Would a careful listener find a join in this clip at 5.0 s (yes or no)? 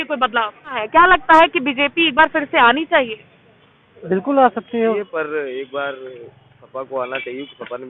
yes